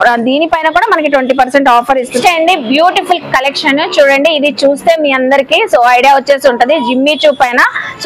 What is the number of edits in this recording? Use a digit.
1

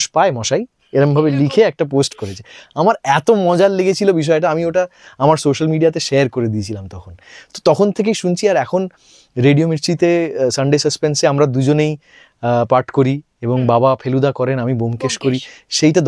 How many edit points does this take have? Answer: 0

